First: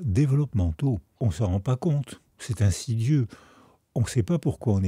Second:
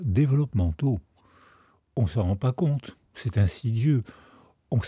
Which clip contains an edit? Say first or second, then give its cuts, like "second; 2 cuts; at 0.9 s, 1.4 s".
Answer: first; 1 cut; at 1.1 s